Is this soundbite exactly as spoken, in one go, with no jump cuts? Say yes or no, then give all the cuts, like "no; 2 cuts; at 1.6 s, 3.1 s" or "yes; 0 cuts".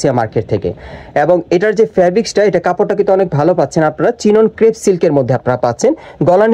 yes; 0 cuts